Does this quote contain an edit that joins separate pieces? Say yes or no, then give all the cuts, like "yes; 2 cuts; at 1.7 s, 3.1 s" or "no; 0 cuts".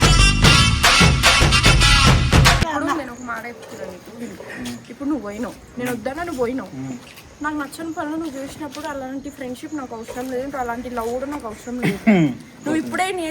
yes; 1 cut; at 2.7 s